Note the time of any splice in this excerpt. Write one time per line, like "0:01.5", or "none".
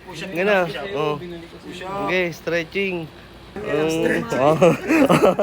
0:03.6